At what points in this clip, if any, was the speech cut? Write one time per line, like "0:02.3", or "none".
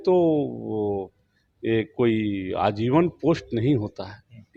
none